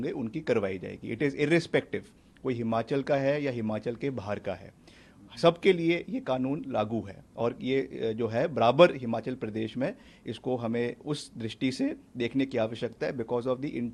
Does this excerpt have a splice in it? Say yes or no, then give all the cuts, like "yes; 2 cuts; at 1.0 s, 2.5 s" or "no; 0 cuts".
no; 0 cuts